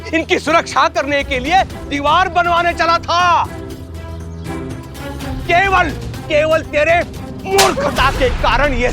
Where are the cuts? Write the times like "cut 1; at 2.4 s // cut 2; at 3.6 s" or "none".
cut 1; at 5.4 s